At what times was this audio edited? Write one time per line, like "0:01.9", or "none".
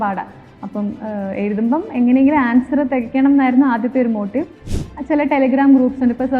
0:04.8